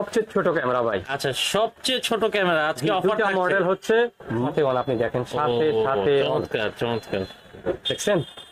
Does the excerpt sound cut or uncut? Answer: cut